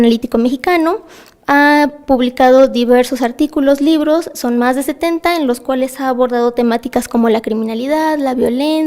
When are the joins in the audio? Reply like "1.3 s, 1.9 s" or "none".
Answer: none